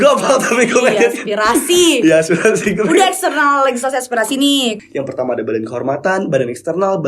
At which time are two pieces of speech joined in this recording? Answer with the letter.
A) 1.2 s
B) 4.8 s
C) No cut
B